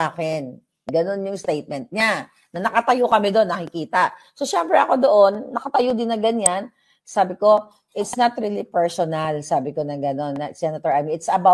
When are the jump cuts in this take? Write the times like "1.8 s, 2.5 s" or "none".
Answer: none

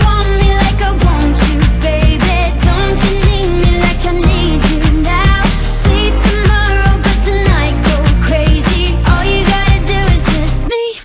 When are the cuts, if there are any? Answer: none

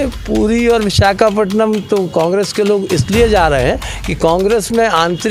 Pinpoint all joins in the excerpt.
none

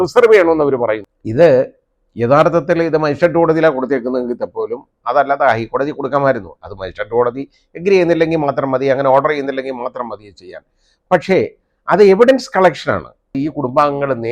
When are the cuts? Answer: 1.2 s, 13.3 s

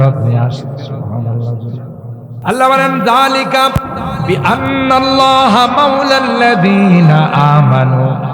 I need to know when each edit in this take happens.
2.3 s

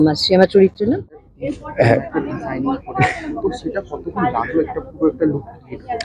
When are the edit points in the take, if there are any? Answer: 1.1 s

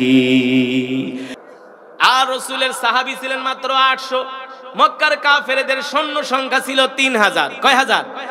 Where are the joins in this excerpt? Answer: 1.3 s

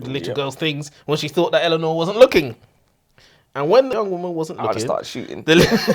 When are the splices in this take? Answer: 3.9 s

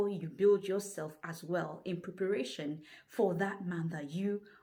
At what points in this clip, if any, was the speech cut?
none

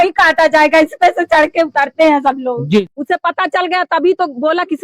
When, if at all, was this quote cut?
2.8 s

